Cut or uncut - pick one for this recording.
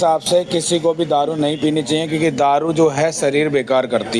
uncut